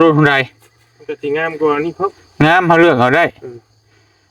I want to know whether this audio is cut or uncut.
uncut